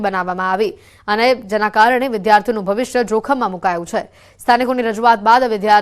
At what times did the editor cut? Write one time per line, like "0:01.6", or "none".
0:03.0